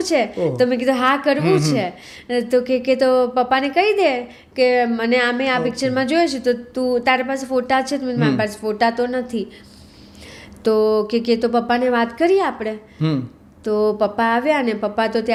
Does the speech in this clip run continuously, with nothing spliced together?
yes; 0 cuts

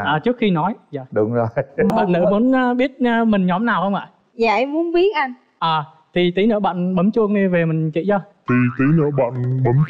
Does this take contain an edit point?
yes; 1 cut; at 1.9 s

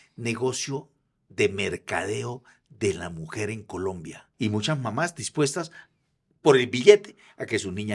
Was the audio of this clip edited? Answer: yes; 1 cut; at 4.2 s

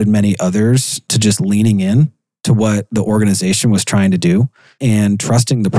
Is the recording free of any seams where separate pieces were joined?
yes; 0 cuts

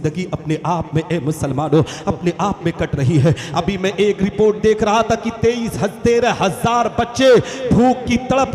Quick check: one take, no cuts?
yes; 0 cuts

